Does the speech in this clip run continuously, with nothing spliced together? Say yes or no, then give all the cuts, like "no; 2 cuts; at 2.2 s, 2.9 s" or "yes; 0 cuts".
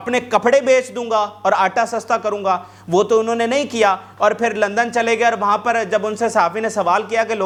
yes; 0 cuts